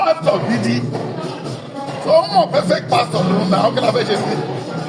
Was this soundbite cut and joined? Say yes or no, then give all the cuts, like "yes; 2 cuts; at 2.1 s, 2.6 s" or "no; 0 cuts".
no; 0 cuts